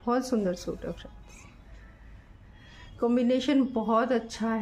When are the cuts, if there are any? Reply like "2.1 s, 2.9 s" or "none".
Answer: none